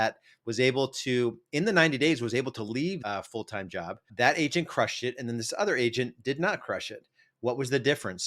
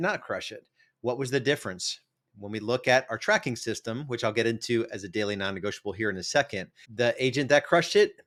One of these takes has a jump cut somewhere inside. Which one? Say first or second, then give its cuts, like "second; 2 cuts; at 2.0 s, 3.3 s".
first; 1 cut; at 3.0 s